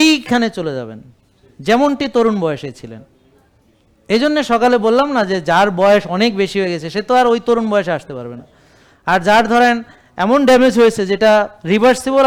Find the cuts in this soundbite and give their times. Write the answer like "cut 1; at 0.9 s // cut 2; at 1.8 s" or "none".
none